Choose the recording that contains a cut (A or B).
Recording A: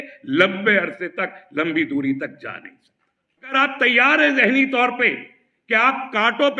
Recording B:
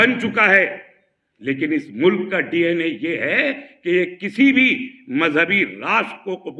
A